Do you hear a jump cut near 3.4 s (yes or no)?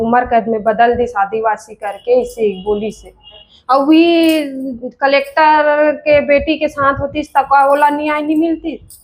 yes